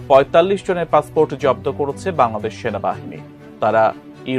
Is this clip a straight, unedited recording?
yes; 0 cuts

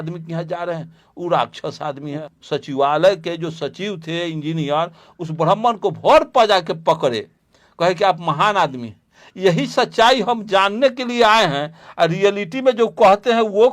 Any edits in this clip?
yes; 1 cut; at 2.2 s

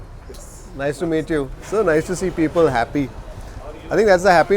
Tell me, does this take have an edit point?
yes; 1 cut; at 1.5 s

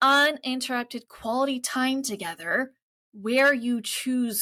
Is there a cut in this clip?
no; 0 cuts

